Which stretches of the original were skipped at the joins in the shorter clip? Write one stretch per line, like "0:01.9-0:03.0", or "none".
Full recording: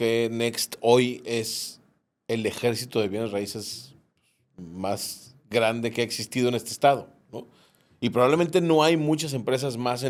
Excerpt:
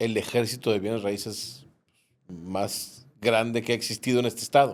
none

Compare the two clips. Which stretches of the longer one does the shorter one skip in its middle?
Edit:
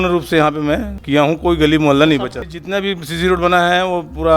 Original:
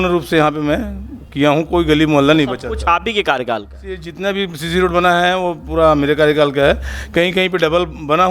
0:00.9-0:01.2
0:02.7-0:03.9

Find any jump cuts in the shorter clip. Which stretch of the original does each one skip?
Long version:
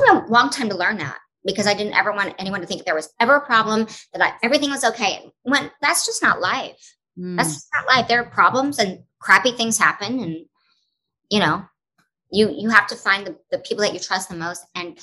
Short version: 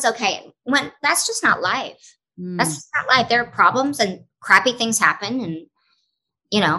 none

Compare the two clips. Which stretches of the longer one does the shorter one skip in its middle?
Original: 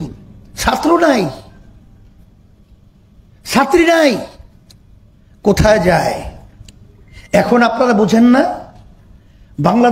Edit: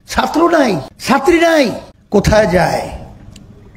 0:01.4-0:03.4
0:04.4-0:05.2

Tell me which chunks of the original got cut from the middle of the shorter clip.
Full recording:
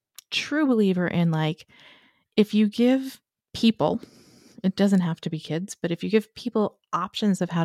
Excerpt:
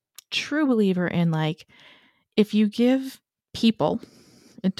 none

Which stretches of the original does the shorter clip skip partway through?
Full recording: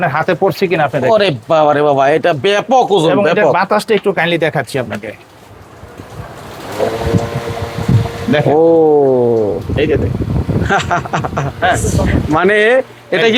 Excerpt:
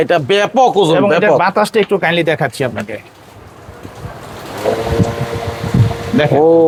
none

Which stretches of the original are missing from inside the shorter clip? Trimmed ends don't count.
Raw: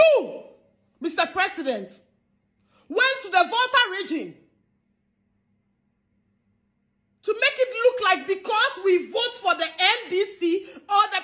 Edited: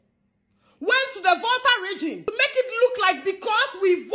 0:04.4-0:07.3

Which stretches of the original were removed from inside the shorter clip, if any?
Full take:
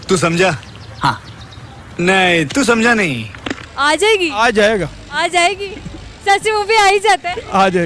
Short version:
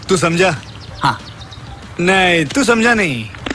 none

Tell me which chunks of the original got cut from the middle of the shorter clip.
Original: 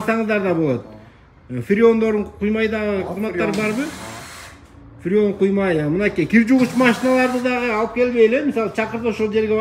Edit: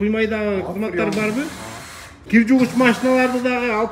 0:04.7-0:06.3

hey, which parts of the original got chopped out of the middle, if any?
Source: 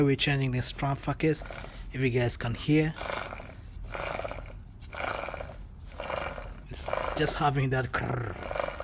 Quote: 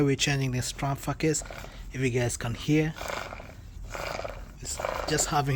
0:04.3-0:06.4

